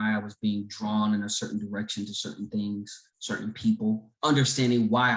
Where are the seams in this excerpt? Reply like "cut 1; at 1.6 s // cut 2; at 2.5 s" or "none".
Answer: cut 1; at 4.1 s